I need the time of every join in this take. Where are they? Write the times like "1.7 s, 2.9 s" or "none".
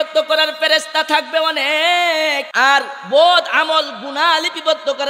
2.5 s